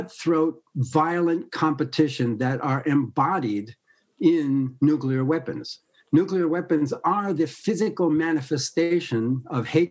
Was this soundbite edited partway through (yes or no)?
no